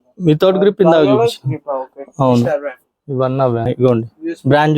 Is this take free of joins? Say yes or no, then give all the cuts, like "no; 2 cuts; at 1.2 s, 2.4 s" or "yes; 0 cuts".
no; 1 cut; at 3.6 s